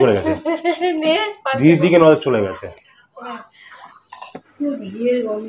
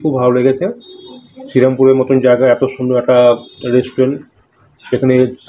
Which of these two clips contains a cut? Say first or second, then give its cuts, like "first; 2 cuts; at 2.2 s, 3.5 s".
first; 1 cut; at 4.3 s